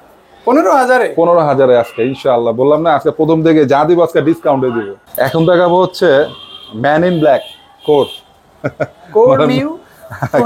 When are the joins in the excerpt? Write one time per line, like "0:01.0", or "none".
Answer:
none